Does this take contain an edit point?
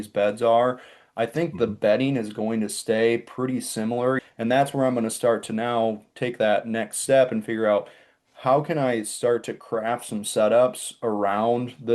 yes; 1 cut; at 4.2 s

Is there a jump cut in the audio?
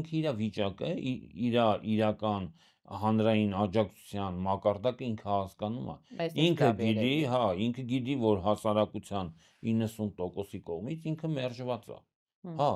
no; 0 cuts

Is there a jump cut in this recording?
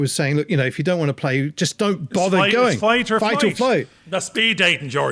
yes; 1 cut; at 4.0 s

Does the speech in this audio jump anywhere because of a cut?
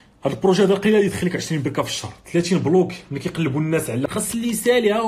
yes; 1 cut; at 4.0 s

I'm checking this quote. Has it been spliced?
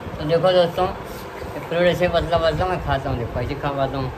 no; 0 cuts

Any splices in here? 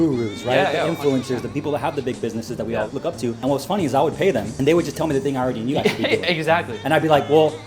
yes; 3 cuts; at 1.5 s, 3.1 s, 4.5 s

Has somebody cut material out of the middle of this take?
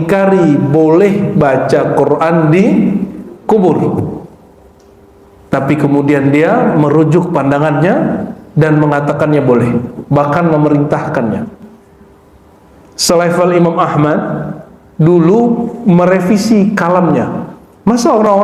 no; 0 cuts

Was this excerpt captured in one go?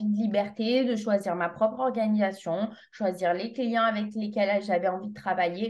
yes; 0 cuts

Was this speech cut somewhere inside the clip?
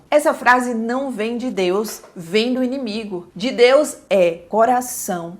no; 0 cuts

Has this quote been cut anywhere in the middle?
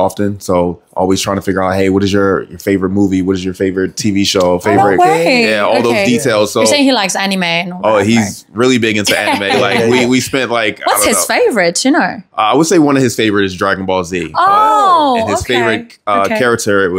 no; 0 cuts

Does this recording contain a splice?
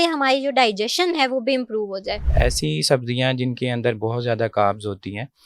yes; 1 cut; at 2.2 s

